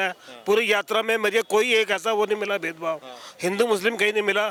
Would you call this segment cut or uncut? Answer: uncut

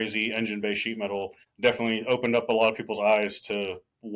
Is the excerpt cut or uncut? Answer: cut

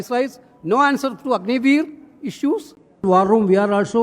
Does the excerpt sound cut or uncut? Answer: cut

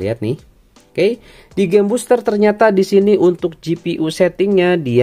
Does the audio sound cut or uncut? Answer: uncut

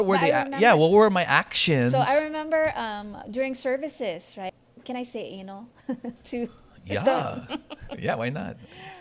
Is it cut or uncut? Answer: cut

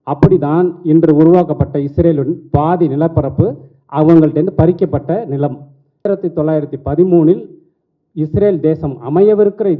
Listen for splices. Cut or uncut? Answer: cut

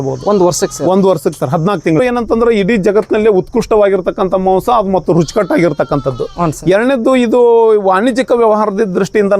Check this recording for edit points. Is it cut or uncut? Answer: cut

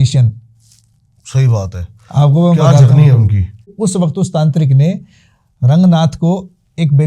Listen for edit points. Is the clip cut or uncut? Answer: cut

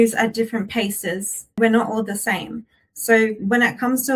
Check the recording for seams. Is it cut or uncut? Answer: cut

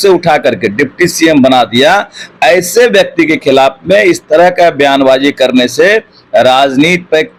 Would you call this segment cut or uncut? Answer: uncut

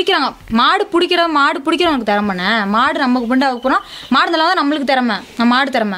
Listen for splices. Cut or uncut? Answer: uncut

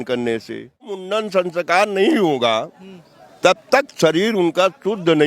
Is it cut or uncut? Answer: cut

